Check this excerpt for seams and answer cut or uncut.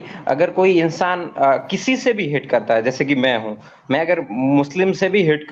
uncut